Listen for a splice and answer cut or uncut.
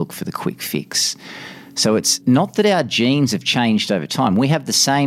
cut